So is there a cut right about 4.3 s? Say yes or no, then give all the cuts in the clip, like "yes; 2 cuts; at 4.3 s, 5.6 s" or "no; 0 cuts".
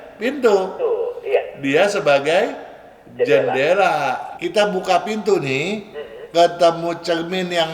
yes; 1 cut; at 4.3 s